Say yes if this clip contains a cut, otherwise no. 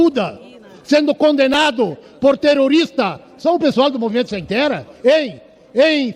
no